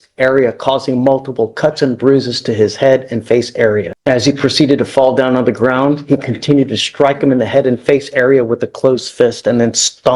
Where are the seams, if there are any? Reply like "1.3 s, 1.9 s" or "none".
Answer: 3.9 s